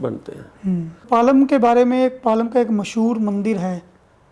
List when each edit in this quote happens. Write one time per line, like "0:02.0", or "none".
0:01.0